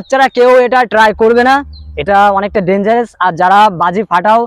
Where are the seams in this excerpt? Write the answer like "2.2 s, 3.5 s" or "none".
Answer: none